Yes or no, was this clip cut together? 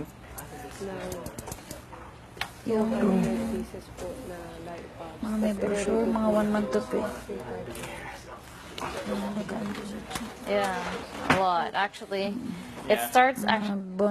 no